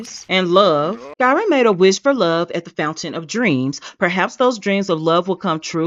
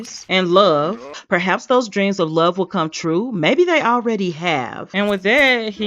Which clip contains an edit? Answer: second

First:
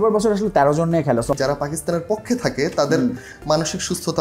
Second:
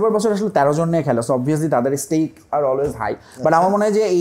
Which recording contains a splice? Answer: first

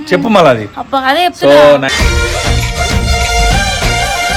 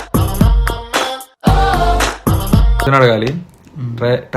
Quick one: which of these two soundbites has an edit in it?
second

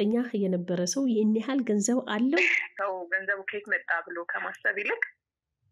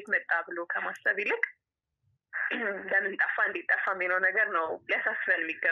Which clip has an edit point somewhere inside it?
first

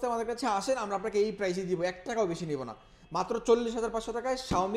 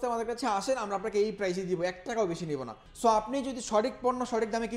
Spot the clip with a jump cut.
second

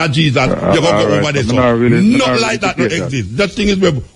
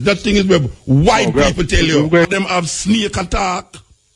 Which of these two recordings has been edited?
second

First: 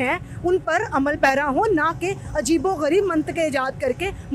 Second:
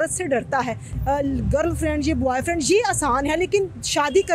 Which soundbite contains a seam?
second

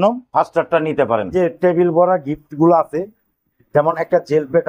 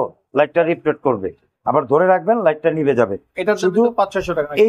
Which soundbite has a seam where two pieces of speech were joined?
first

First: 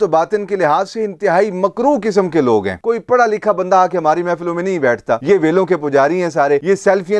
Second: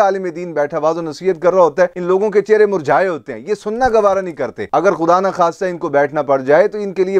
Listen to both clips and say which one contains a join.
first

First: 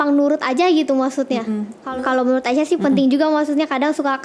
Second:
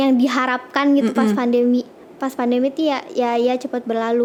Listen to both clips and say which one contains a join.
first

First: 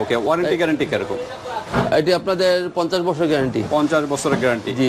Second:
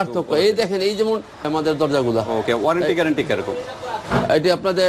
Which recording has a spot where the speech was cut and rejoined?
second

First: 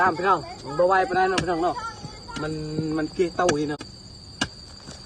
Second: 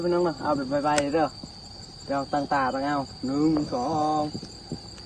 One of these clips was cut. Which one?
first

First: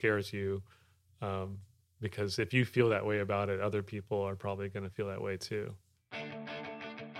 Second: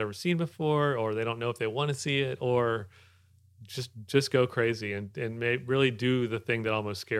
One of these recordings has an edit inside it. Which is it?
first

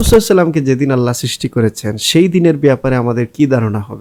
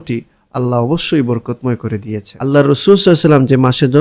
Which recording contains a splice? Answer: second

